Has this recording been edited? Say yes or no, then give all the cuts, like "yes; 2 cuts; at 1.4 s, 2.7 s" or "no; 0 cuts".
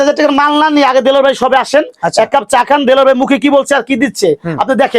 no; 0 cuts